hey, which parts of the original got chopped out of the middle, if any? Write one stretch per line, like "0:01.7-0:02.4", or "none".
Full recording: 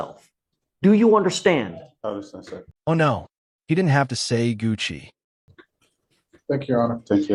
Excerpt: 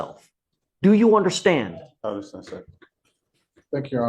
0:02.7-0:05.5